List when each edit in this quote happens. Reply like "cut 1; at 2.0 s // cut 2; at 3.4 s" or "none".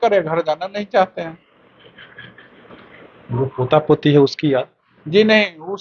none